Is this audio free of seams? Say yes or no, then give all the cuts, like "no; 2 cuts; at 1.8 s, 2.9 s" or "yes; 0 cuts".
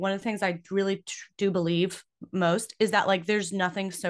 yes; 0 cuts